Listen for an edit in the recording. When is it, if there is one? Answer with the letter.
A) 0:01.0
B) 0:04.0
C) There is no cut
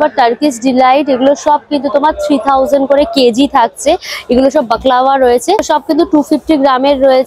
C